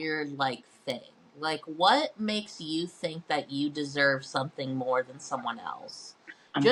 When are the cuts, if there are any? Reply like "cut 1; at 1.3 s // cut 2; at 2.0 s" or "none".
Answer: none